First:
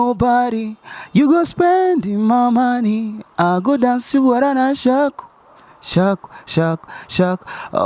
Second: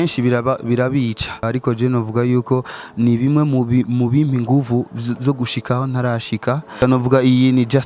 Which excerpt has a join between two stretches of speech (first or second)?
second